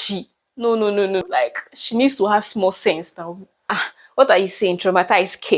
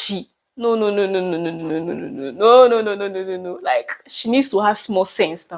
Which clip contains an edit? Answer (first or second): first